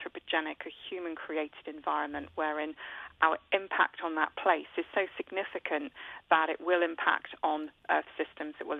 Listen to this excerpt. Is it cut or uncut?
uncut